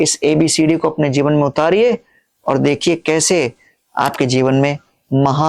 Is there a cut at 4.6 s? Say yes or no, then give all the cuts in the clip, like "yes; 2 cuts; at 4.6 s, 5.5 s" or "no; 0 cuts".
no; 0 cuts